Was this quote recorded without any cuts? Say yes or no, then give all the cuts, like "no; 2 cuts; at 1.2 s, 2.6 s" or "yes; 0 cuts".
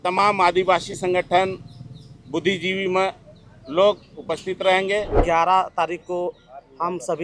no; 1 cut; at 5.2 s